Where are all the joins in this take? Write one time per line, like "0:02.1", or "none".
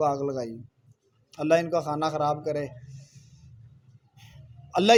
none

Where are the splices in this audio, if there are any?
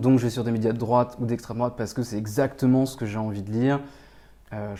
none

